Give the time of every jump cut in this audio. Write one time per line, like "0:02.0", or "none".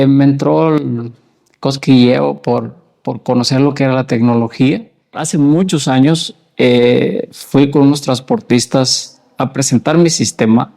0:05.2